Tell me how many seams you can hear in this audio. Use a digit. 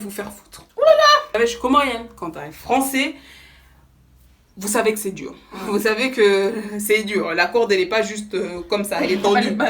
1